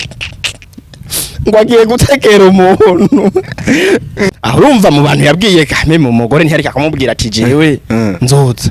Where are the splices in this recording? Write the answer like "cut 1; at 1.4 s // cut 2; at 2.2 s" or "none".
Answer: cut 1; at 4.3 s